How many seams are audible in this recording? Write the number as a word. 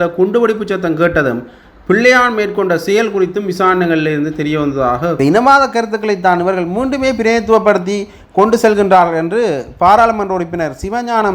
one